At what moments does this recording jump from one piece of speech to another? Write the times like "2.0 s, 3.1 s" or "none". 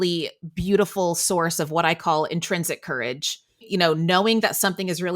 3.7 s